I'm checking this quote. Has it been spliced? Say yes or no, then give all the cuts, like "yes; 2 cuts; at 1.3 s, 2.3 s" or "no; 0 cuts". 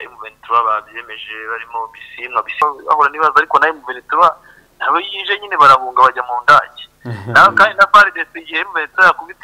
yes; 1 cut; at 2.6 s